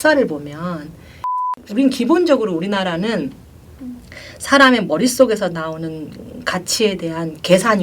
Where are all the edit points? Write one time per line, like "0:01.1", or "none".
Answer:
0:01.3